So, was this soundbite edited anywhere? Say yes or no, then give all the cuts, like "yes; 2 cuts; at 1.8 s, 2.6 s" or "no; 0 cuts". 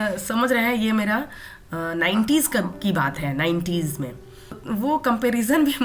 yes; 1 cut; at 4.6 s